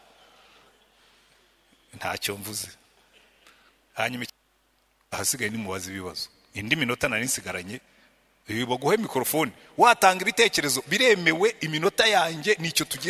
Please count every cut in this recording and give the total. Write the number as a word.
one